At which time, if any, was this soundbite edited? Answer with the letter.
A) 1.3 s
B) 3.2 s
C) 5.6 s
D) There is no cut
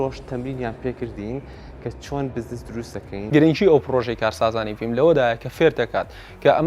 B